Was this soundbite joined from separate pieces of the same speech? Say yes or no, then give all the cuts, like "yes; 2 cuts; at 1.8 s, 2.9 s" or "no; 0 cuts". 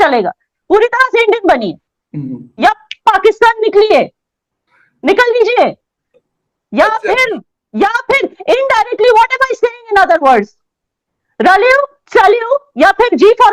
no; 0 cuts